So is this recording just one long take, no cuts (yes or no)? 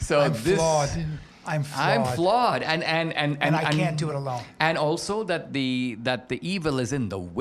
yes